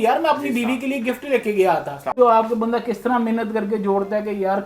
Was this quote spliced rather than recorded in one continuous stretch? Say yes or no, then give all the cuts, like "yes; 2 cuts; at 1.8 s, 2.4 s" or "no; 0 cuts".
yes; 1 cut; at 2.1 s